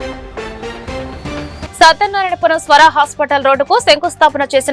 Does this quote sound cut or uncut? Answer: uncut